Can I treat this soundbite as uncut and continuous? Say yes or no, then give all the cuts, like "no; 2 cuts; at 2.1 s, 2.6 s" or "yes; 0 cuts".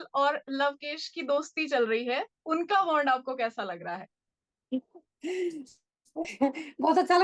yes; 0 cuts